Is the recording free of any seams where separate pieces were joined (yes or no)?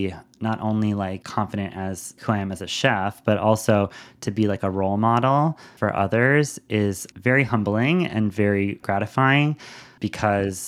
no